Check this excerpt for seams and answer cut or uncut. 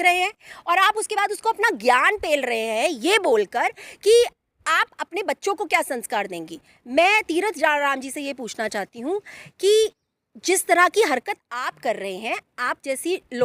uncut